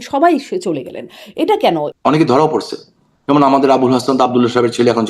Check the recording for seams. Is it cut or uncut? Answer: cut